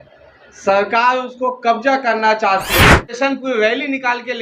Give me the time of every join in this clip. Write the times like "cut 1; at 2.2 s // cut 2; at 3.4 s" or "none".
cut 1; at 3.1 s